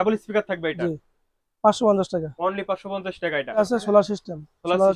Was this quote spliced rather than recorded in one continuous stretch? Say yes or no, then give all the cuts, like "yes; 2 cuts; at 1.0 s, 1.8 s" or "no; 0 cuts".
yes; 1 cut; at 3.6 s